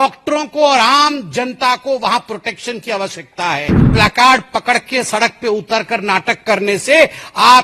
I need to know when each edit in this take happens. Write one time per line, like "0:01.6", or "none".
0:03.9